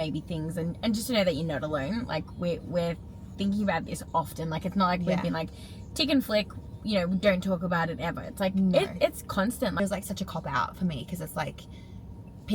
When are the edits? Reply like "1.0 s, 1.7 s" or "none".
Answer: 9.8 s